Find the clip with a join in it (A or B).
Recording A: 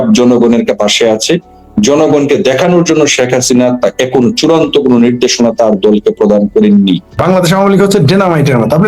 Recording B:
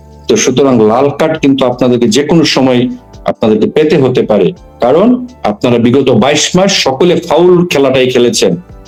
A